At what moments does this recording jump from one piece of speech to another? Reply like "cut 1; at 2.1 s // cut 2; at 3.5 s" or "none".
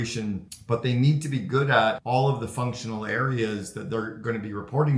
cut 1; at 2.0 s